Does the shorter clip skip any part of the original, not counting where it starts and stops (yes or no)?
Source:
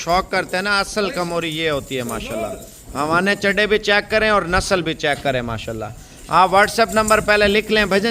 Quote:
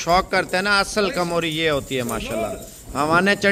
no